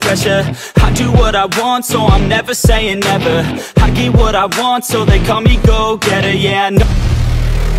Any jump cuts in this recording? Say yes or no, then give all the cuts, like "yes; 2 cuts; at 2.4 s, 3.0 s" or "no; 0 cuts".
yes; 1 cut; at 6.8 s